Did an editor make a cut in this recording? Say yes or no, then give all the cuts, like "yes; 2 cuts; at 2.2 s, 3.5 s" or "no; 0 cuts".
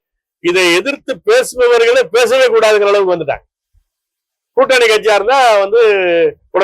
no; 0 cuts